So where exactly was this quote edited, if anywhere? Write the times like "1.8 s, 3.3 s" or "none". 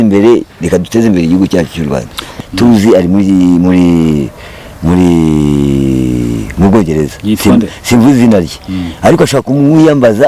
2.2 s